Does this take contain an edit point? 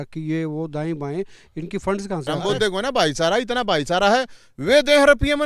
yes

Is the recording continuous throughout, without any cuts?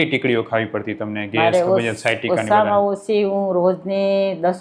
yes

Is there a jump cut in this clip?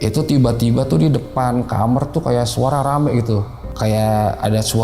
yes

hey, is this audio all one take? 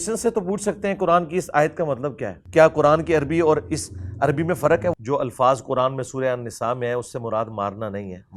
no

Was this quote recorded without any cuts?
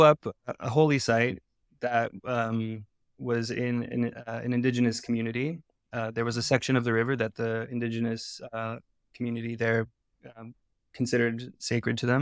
yes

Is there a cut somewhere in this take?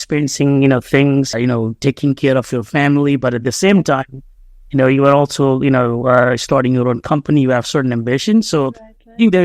yes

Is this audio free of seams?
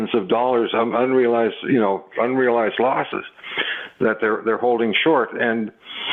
yes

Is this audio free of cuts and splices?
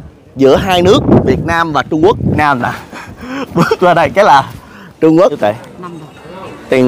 no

